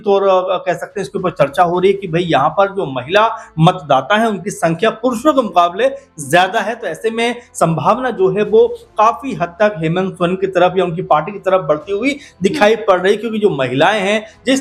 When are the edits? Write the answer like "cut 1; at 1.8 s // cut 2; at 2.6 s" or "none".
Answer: none

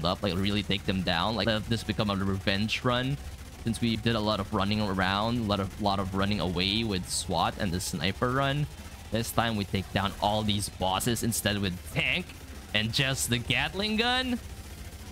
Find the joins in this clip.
cut 1; at 1.4 s // cut 2; at 3.9 s

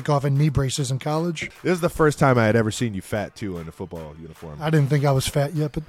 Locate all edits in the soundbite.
cut 1; at 1.5 s // cut 2; at 4.6 s

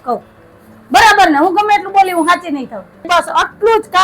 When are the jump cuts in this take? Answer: cut 1; at 3.1 s

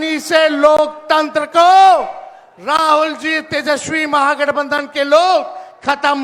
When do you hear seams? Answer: none

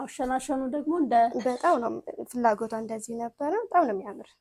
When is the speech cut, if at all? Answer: none

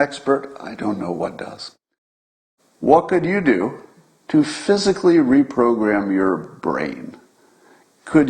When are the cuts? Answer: cut 1; at 2.2 s

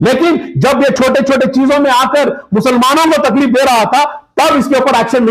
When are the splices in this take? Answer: cut 1; at 1.0 s

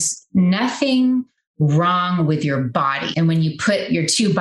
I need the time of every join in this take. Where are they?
cut 1; at 3.0 s

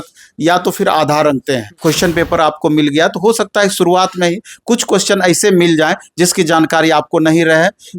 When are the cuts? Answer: cut 1; at 1.7 s

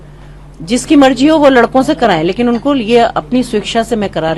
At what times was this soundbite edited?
none

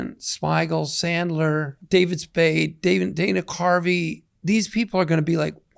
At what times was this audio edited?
cut 1; at 1.8 s

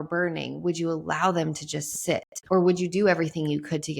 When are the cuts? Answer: cut 1; at 2.3 s

